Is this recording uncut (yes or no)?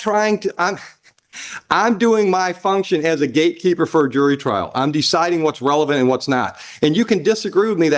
yes